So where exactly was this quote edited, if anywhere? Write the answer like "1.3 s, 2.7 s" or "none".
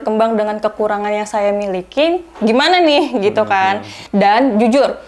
3.9 s